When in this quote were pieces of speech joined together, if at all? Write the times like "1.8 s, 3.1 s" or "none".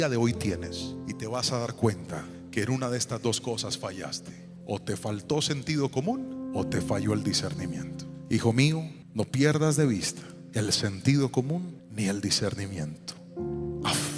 8.1 s